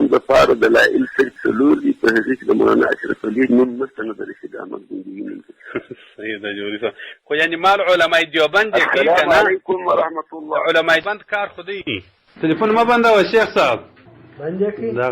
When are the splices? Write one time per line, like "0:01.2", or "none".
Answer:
0:01.4